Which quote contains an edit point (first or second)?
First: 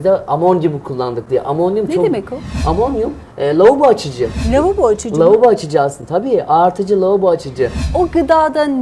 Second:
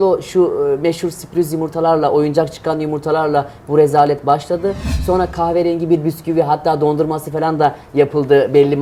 first